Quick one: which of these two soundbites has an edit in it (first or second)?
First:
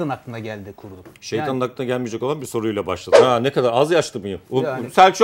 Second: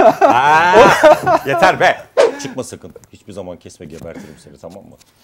first